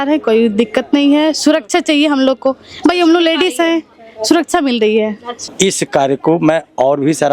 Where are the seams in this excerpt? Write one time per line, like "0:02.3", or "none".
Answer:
0:05.5